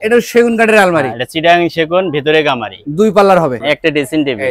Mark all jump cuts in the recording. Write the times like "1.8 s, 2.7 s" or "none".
3.6 s